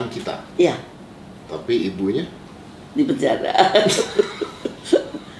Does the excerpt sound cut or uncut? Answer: uncut